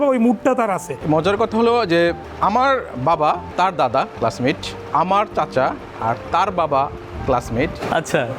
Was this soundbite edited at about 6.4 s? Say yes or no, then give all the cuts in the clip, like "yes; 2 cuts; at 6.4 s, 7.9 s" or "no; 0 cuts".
no; 4 cuts; at 0.9 s, 2.3 s, 3.5 s, 4.7 s